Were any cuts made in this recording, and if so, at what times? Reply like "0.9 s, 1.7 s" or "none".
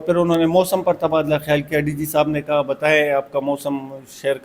none